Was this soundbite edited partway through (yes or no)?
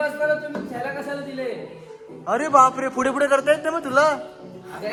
no